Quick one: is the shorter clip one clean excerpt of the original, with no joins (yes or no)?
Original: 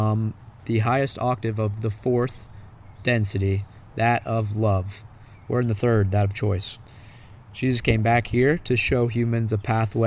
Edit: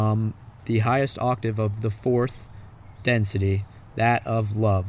yes